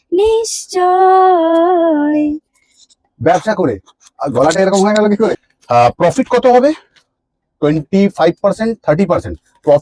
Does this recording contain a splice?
yes; 1 cut; at 5.5 s

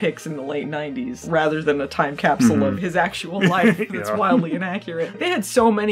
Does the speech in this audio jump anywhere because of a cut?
no; 0 cuts

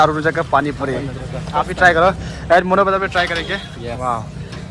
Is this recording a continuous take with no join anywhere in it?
yes; 0 cuts

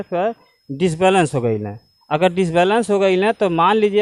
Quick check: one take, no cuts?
yes; 0 cuts

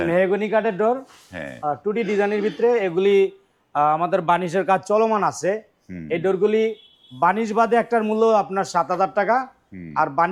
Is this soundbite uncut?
yes; 0 cuts

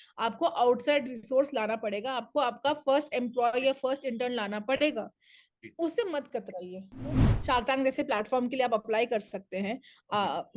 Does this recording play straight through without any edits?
no; 1 cut; at 7.3 s

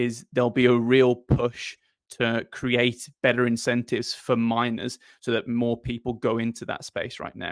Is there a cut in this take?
no; 0 cuts

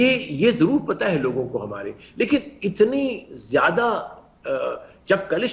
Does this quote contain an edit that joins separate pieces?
no; 0 cuts

